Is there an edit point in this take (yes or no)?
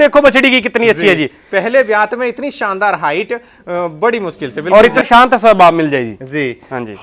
yes